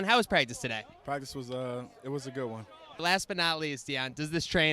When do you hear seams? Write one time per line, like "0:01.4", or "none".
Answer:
0:03.0